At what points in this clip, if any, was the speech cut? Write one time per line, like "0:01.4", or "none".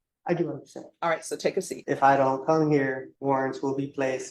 0:01.8
0:03.1